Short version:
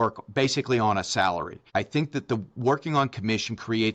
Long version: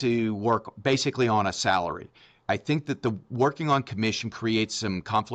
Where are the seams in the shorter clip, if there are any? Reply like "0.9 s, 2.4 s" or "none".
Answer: 1.6 s